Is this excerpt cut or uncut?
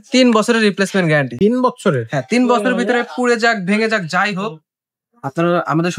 uncut